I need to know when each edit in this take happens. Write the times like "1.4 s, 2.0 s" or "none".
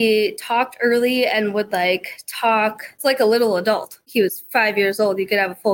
3.0 s, 4.0 s